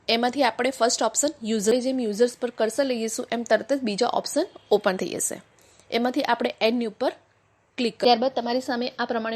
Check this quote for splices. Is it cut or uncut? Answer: cut